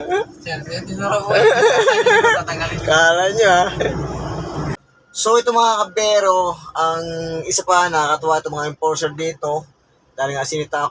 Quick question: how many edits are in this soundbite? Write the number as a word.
one